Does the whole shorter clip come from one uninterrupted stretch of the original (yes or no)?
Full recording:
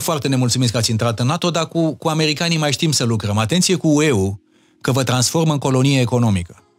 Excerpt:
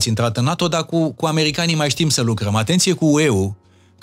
yes